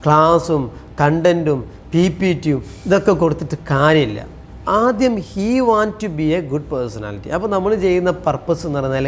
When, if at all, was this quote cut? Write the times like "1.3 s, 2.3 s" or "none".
none